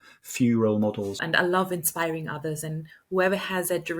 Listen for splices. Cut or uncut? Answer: cut